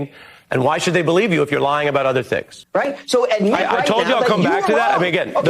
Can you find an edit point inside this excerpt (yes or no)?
yes